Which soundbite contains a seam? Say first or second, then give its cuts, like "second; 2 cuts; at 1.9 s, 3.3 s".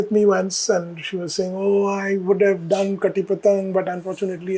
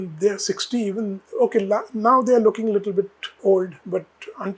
second; 2 cuts; at 1.2 s, 3.2 s